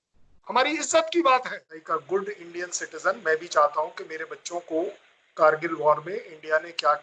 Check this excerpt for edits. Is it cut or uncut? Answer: cut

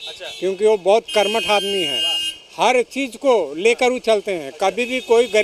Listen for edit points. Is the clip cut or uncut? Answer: uncut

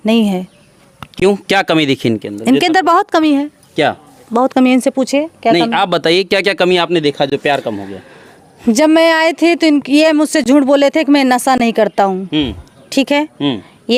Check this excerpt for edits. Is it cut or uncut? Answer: uncut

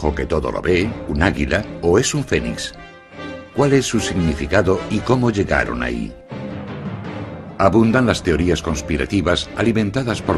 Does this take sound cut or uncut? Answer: uncut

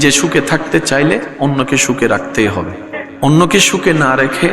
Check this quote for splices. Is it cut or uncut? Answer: cut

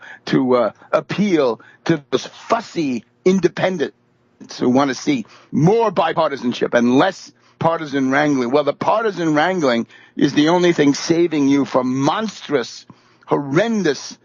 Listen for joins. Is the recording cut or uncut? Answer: uncut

